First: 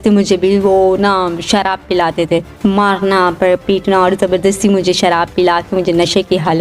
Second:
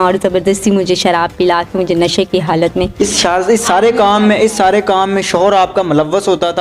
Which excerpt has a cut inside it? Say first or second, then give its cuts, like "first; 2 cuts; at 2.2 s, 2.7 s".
first; 1 cut; at 2.5 s